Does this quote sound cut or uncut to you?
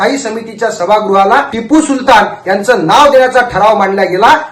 cut